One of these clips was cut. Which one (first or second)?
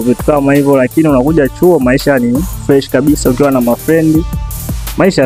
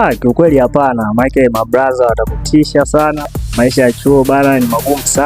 second